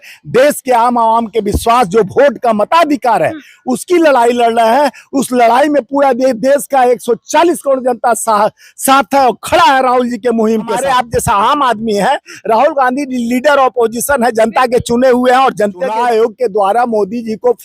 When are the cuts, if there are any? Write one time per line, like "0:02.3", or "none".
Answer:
0:10.8
0:15.9